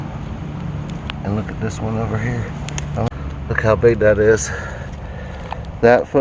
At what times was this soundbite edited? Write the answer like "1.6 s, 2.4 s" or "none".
3.1 s

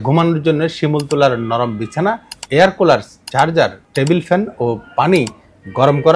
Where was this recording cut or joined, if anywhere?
2.3 s, 3.8 s

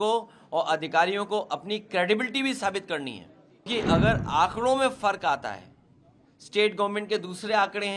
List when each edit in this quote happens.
3.7 s

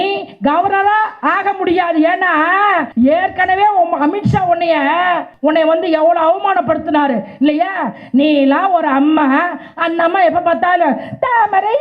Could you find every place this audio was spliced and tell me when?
2.9 s, 5.3 s

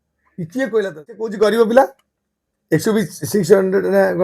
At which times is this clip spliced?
1.3 s

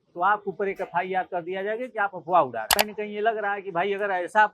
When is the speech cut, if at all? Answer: 2.7 s

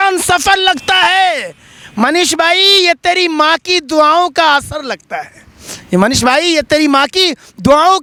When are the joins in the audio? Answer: none

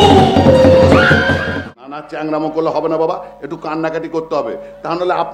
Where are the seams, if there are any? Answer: 1.5 s

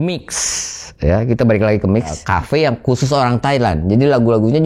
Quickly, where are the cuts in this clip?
2.2 s

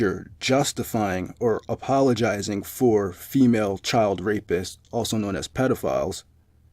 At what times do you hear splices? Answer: 5.1 s

